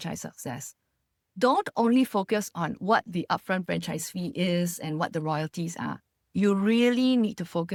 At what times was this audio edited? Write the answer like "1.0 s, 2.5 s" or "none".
none